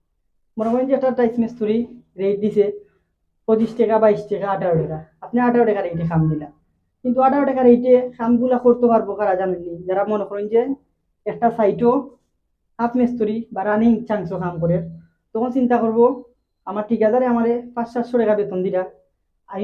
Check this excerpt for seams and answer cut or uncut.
uncut